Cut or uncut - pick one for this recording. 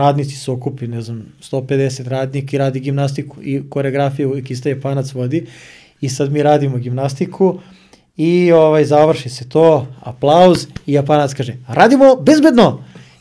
uncut